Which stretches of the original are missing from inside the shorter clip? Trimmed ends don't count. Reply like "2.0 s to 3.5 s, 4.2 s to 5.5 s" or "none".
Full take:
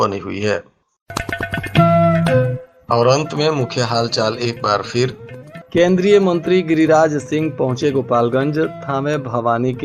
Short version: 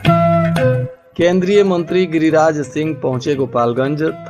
2.7 s to 5.5 s

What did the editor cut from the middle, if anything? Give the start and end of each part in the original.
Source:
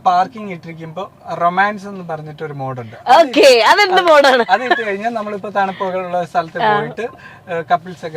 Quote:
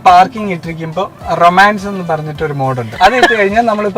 3.0 s to 4.5 s

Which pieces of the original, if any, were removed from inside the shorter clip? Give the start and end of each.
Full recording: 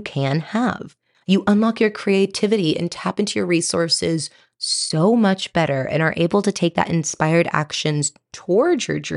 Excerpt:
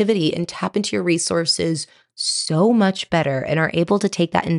none

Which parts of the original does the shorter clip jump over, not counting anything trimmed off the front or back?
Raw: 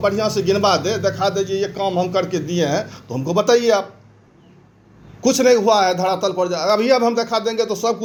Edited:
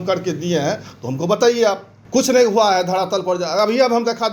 4.0 s to 5.0 s

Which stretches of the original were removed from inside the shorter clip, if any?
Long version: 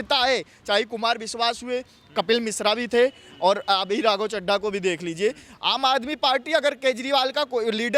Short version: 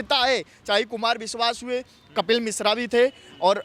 none

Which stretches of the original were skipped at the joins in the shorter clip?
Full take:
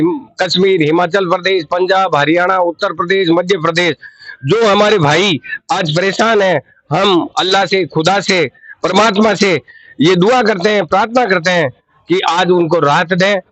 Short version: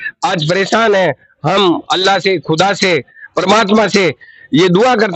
none

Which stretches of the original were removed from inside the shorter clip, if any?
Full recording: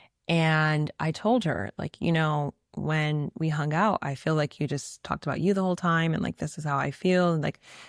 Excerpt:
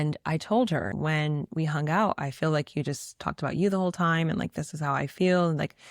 1.7 s to 2.8 s

